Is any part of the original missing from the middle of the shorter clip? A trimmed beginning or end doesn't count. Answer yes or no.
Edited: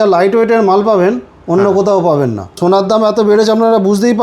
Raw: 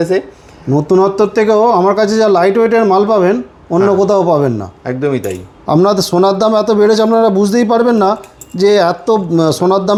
yes